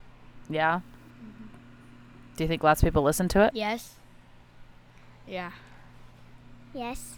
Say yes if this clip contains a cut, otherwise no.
yes